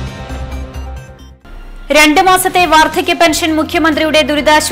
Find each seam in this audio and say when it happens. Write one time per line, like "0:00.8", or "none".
0:01.2